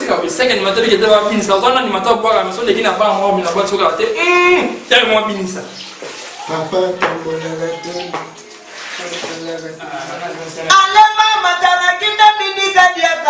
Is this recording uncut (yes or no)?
no